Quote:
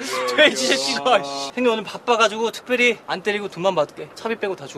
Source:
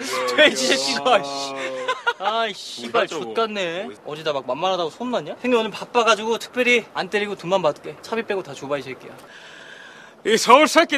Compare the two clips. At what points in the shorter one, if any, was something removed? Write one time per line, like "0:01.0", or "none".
0:01.5